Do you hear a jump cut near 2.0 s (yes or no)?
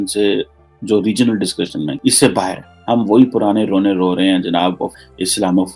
yes